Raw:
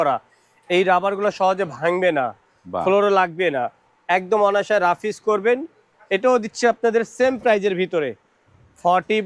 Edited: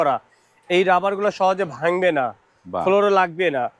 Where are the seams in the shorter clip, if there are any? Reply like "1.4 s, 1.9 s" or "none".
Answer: none

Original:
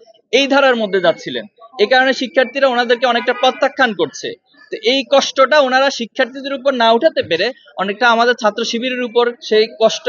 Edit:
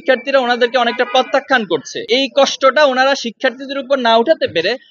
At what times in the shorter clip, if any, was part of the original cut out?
1.9 s

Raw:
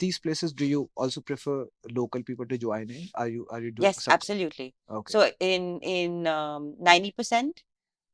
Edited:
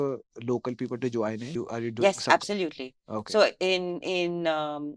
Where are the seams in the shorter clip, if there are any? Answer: 1.5 s

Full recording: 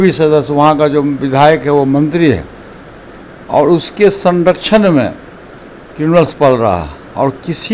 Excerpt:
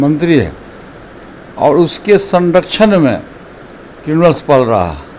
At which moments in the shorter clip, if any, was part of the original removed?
none

